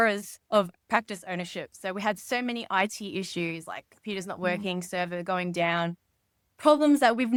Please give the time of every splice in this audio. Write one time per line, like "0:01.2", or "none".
none